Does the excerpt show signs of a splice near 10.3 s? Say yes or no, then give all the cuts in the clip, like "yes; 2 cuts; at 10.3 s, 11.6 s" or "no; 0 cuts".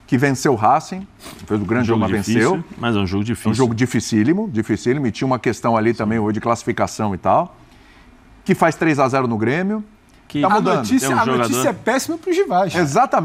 yes; 1 cut; at 10.3 s